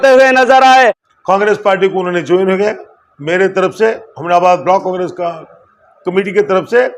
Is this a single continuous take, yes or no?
no